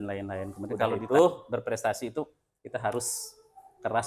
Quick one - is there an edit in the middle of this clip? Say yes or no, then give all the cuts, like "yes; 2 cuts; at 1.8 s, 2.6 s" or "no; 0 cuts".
yes; 1 cut; at 1.0 s